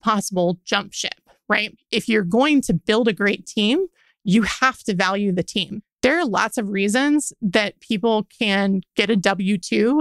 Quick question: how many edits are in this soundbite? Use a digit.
2